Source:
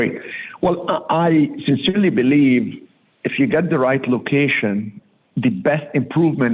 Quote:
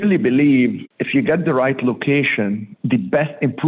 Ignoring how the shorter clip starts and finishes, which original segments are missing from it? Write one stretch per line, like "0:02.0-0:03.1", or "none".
0:02.8-0:03.2
0:05.0-0:05.2